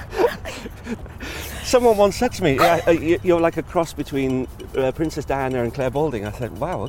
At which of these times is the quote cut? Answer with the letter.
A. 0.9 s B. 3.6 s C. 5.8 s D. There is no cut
A